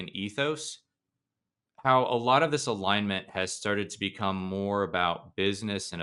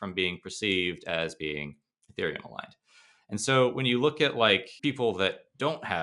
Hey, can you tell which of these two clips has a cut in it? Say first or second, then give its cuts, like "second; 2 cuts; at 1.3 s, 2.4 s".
second; 1 cut; at 4.7 s